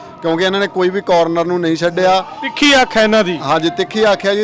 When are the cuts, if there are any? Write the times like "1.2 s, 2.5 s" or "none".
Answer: none